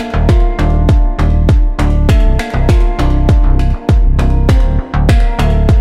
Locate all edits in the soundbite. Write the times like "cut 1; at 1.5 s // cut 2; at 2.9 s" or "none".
none